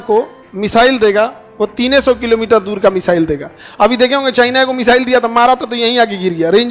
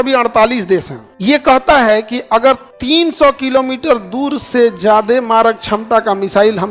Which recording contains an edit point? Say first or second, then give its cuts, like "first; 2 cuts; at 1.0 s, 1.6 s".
second; 2 cuts; at 1.1 s, 2.7 s